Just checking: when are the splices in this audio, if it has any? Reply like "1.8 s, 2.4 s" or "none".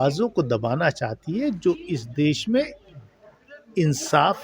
none